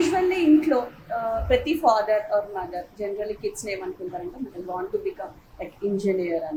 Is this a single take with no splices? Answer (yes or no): yes